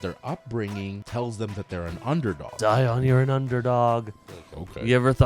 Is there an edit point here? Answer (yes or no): yes